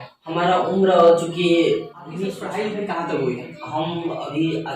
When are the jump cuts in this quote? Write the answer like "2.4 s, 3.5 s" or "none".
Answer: 2.4 s